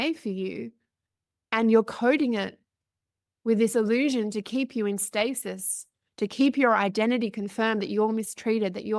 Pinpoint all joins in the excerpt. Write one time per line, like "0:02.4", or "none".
none